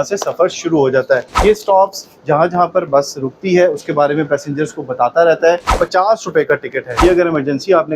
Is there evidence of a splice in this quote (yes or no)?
yes